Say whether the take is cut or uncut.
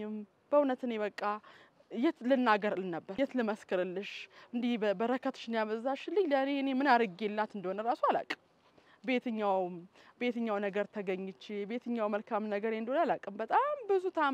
cut